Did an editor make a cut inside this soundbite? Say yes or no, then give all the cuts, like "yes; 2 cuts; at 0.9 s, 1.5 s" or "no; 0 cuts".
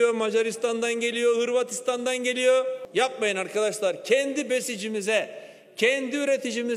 yes; 1 cut; at 2.8 s